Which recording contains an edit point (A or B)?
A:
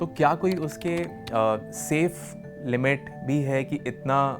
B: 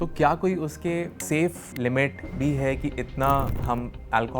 B